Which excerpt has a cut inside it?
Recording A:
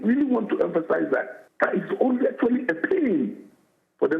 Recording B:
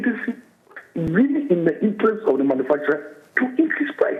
A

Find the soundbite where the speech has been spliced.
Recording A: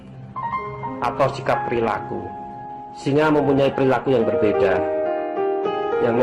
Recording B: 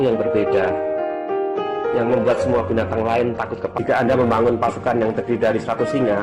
B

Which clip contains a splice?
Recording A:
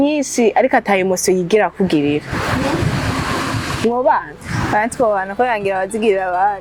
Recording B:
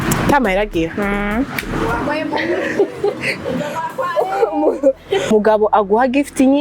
B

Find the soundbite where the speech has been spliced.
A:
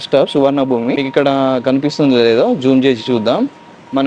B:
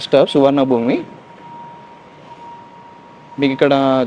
A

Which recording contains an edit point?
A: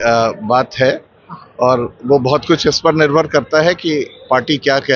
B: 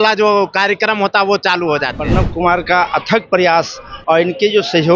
B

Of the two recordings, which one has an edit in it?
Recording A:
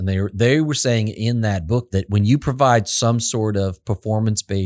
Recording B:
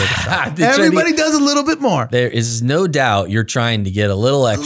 A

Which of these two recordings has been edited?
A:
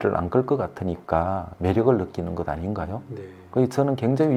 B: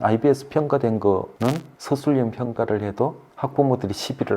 B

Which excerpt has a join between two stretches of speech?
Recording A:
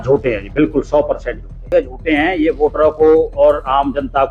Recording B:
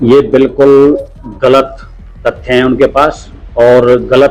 A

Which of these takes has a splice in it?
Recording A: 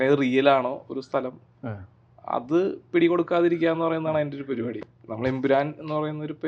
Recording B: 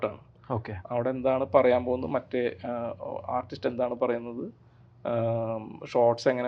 A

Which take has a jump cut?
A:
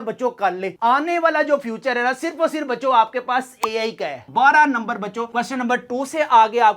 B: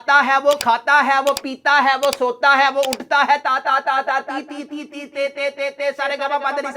A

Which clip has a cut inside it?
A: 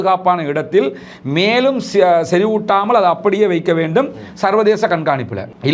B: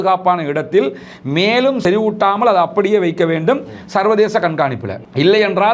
B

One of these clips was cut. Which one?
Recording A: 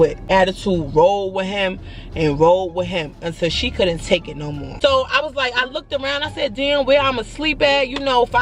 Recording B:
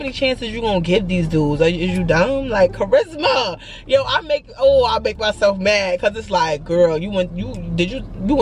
A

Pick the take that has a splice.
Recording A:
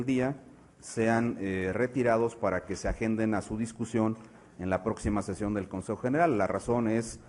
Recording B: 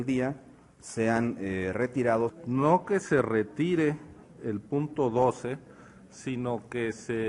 B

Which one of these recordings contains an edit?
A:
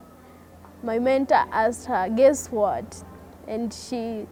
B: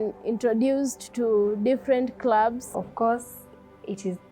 B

